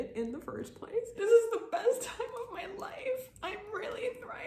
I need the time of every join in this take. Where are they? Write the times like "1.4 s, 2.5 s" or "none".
1.1 s